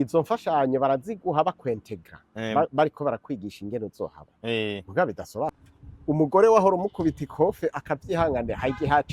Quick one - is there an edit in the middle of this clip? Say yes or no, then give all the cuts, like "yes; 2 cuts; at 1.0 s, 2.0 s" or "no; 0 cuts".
yes; 1 cut; at 5.5 s